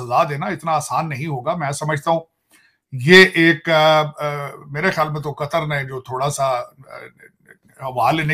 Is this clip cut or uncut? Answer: uncut